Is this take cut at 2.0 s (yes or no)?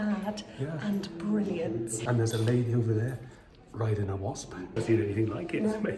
yes